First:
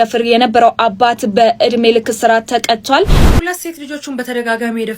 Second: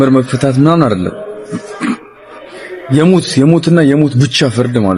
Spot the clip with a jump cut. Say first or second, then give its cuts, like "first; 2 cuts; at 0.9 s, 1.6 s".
first; 1 cut; at 3.2 s